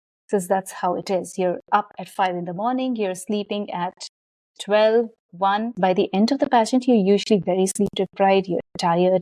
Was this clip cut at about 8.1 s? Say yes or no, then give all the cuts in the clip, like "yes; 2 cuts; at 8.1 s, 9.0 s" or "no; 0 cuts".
no; 1 cut; at 5.7 s